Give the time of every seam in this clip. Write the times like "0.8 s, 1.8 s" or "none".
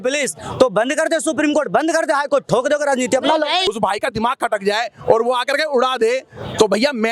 3.7 s